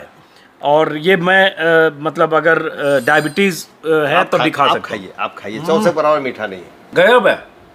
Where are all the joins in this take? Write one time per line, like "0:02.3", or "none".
none